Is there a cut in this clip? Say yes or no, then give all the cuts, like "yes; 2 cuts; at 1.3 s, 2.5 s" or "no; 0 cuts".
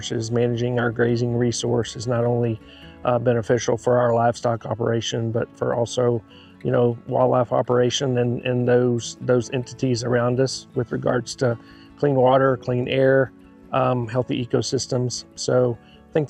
no; 0 cuts